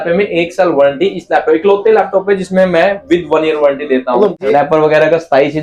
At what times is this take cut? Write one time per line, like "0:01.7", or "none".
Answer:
0:04.3